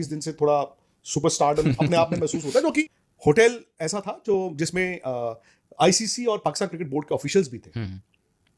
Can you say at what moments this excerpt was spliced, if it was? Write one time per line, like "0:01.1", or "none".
0:03.0